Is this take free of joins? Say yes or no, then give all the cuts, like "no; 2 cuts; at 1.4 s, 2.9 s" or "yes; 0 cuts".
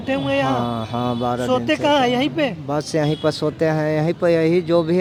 yes; 0 cuts